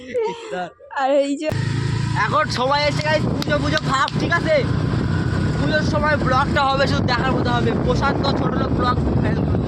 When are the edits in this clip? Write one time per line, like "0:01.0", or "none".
0:01.5